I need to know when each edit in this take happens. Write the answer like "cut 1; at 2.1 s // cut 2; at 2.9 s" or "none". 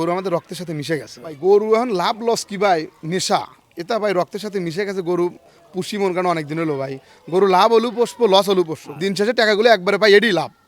cut 1; at 1.4 s // cut 2; at 8.9 s